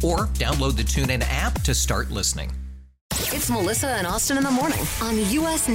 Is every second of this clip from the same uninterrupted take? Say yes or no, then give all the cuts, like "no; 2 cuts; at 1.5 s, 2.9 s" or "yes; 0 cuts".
no; 1 cut; at 3.0 s